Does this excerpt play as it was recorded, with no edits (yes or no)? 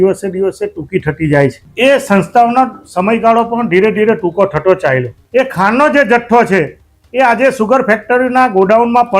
no